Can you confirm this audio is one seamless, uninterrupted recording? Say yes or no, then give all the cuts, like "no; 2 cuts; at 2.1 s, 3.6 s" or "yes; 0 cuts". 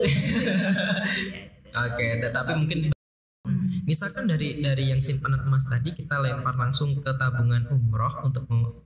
no; 1 cut; at 3.3 s